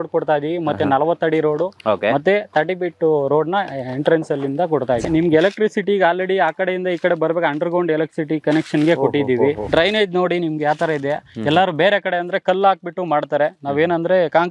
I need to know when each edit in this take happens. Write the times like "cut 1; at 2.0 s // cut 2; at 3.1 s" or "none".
cut 1; at 5.0 s // cut 2; at 9.7 s